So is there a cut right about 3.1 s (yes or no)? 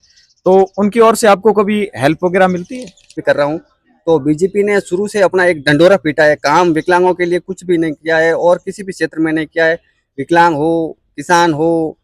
yes